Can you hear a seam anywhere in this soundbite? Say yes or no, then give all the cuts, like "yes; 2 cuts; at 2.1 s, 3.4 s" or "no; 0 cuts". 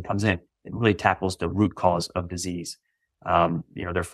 no; 0 cuts